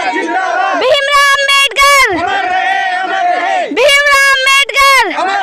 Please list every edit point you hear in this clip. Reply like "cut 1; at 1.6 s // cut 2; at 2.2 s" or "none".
none